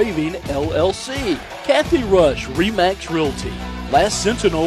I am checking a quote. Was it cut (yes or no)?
yes